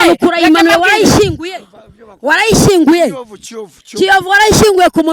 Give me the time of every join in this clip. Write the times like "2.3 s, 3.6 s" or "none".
none